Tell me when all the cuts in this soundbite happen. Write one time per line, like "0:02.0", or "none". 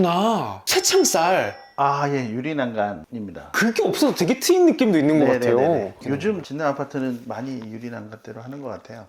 none